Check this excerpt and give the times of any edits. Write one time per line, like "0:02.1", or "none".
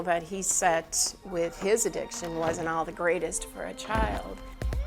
none